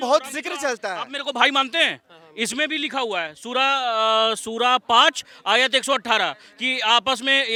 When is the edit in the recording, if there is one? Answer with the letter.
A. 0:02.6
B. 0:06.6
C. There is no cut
C